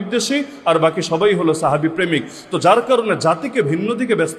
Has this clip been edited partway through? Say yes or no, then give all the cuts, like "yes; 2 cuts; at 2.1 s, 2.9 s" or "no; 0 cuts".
no; 0 cuts